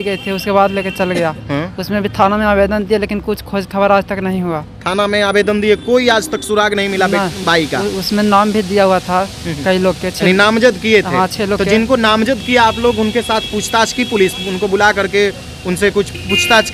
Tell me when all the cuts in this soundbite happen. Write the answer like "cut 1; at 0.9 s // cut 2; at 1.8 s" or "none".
none